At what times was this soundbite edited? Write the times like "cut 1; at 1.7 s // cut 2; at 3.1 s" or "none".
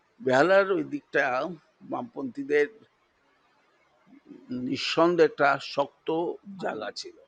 none